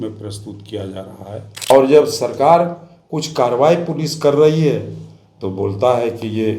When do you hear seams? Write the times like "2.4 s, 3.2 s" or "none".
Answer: 1.7 s